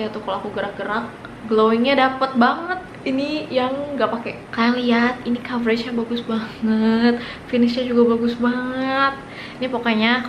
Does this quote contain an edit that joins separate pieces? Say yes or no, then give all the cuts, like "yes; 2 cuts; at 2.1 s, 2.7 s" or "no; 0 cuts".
yes; 2 cuts; at 1.3 s, 4.4 s